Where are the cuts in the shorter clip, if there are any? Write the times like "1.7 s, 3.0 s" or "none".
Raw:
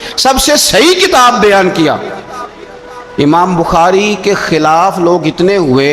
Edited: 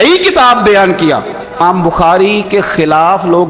1.6 s